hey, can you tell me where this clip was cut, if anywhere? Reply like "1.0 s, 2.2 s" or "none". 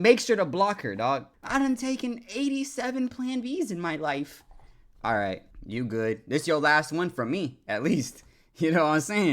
5.5 s